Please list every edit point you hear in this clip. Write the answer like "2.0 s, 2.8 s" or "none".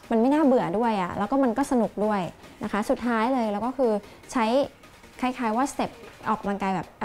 none